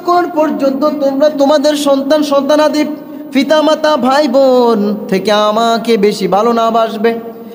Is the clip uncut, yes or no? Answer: yes